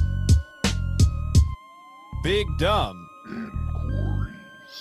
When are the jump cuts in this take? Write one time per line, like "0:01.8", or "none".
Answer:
0:01.2